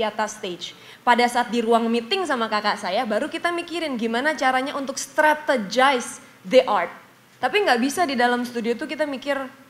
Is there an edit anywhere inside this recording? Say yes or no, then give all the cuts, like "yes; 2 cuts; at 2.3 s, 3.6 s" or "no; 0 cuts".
no; 0 cuts